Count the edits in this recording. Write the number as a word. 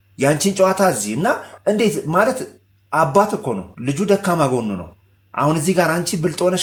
zero